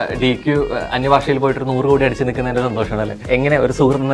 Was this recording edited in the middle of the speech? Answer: yes; 1 cut; at 3.2 s

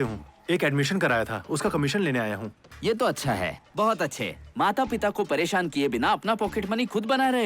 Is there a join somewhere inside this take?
no; 0 cuts

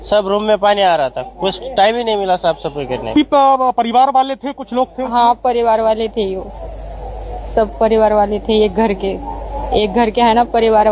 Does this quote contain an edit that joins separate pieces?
no; 0 cuts

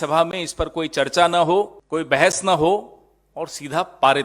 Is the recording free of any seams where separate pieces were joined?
no; 1 cut; at 1.8 s

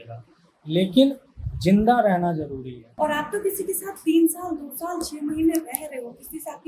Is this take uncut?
no; 1 cut; at 2.8 s

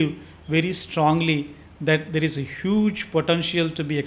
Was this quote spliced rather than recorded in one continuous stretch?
no; 0 cuts

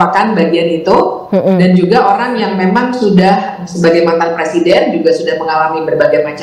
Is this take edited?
no; 0 cuts

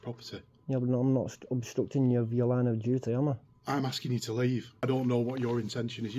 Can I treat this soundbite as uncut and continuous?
no; 1 cut; at 4.8 s

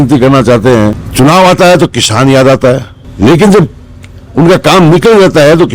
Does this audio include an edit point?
yes; 2 cuts; at 1.0 s, 3.0 s

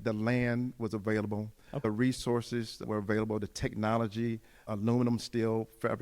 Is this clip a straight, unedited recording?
no; 2 cuts; at 1.8 s, 2.8 s

